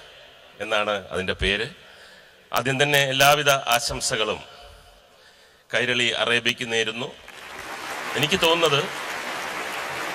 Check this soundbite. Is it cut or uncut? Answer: cut